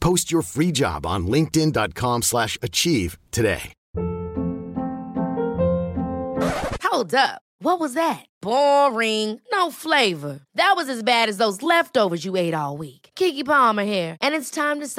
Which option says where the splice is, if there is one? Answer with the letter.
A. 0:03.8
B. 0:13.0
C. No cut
A